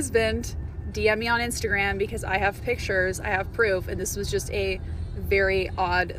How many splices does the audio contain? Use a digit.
0